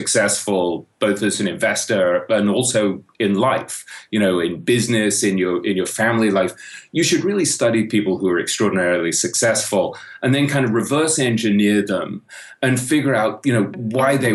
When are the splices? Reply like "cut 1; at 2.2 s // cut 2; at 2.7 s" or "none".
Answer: none